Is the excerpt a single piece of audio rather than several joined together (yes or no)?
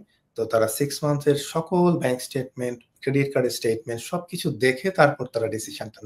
no